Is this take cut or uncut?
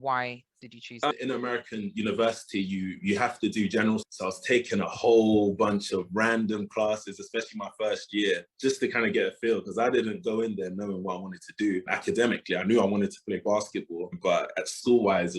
cut